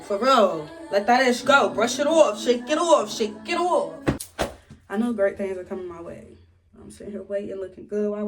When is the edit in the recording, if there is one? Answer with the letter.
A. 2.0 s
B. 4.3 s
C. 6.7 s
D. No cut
B